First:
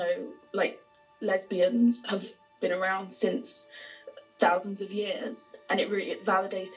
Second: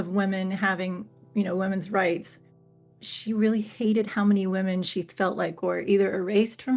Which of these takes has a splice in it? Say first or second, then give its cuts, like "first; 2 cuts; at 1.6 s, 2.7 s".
second; 1 cut; at 2.7 s